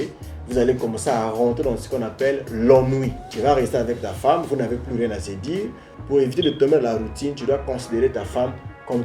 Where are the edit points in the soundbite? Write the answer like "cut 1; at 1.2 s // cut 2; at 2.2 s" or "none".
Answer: cut 1; at 3.2 s // cut 2; at 5.9 s